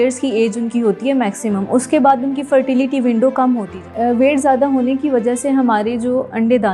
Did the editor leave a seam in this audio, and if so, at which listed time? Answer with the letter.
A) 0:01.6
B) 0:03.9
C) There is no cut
B